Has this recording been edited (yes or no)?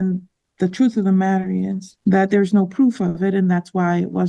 yes